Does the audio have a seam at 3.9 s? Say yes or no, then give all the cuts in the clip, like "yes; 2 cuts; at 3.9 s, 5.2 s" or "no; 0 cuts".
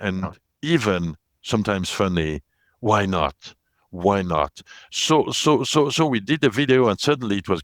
no; 0 cuts